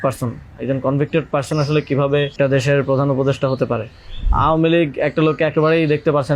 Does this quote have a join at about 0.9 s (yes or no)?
no